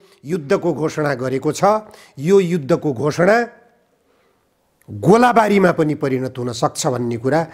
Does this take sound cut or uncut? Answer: uncut